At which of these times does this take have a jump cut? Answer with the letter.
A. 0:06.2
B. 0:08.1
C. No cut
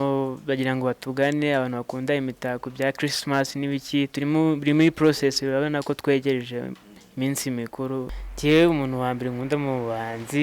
B